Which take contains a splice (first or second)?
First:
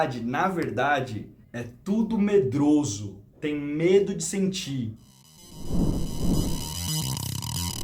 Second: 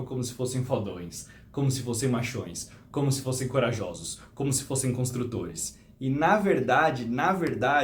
first